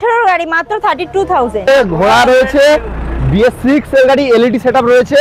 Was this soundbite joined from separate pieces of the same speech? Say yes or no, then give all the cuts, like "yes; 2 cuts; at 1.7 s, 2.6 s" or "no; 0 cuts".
yes; 1 cut; at 1.7 s